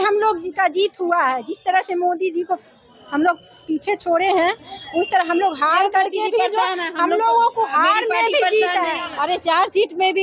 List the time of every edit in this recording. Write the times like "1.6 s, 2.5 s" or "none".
9.2 s